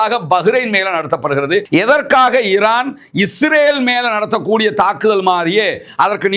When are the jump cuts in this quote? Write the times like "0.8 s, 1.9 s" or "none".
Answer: 1.7 s